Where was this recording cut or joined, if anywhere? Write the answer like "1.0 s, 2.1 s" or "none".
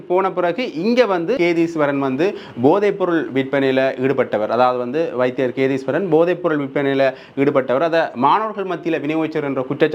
1.4 s